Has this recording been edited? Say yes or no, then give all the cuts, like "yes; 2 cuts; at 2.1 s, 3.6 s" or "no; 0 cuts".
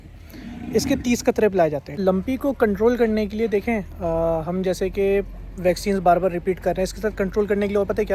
yes; 1 cut; at 1.9 s